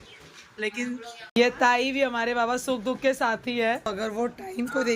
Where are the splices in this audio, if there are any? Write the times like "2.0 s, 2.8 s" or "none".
1.4 s, 3.9 s